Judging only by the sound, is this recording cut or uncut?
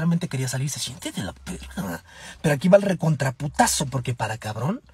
uncut